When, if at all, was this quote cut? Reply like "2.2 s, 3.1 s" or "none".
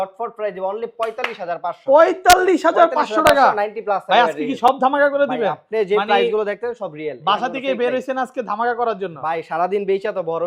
none